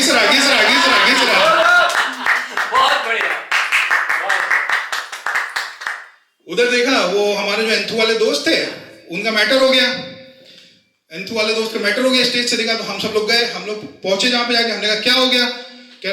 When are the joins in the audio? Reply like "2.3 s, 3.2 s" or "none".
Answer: none